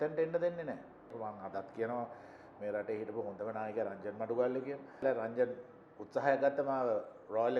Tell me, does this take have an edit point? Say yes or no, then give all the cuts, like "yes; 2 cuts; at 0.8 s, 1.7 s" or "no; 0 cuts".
yes; 2 cuts; at 1.1 s, 5.0 s